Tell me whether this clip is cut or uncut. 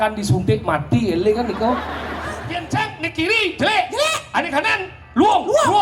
cut